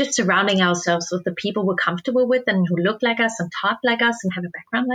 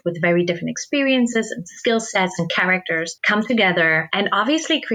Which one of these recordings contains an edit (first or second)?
second